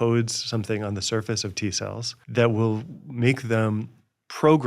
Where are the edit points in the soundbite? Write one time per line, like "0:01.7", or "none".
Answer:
0:02.1